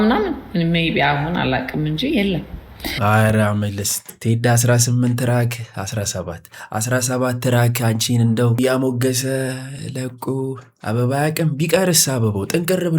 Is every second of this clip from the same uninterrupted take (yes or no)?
no